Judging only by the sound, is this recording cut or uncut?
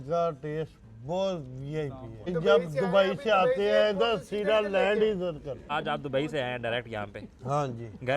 cut